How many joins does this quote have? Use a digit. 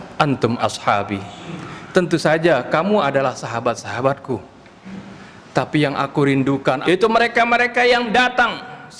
1